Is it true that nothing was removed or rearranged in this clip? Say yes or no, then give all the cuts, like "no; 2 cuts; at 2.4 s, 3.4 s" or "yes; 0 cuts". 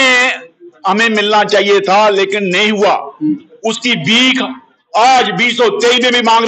yes; 0 cuts